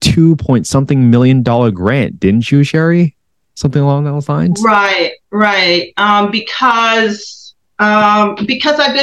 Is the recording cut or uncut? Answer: uncut